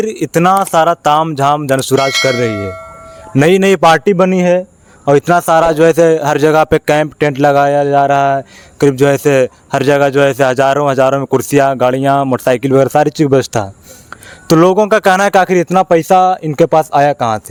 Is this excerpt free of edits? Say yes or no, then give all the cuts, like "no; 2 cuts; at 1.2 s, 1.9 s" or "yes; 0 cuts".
yes; 0 cuts